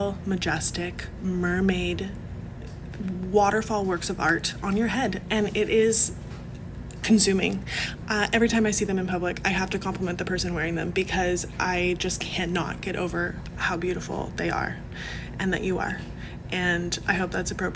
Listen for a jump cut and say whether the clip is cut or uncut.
uncut